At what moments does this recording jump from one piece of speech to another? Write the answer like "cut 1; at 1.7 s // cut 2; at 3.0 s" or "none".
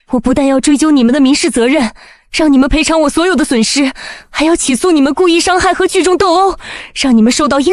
none